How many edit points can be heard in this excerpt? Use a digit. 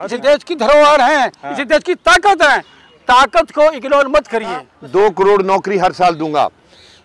1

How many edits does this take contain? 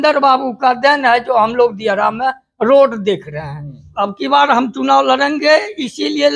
1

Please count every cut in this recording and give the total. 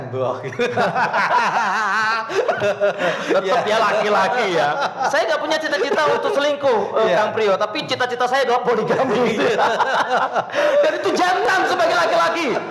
0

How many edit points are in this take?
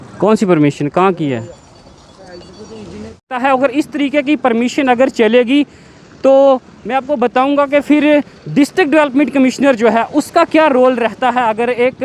1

